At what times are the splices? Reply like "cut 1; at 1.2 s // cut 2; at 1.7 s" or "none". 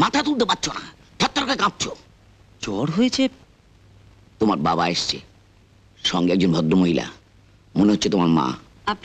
none

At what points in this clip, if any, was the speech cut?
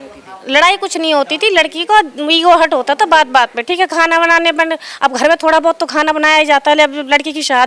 none

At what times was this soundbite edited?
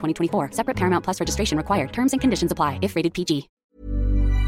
cut 1; at 3.5 s

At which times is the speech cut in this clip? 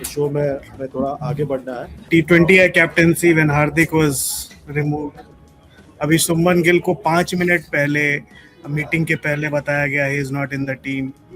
cut 1; at 2.1 s

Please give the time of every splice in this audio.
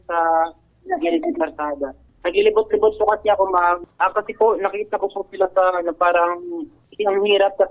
cut 1; at 2.1 s // cut 2; at 3.8 s

